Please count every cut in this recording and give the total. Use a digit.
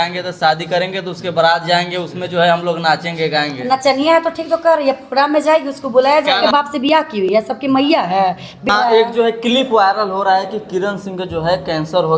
2